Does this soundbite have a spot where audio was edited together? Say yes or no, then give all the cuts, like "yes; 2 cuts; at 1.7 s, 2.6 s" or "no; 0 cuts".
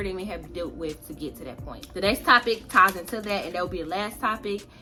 no; 0 cuts